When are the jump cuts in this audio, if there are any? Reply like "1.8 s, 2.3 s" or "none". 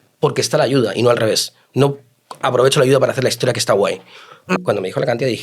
4.5 s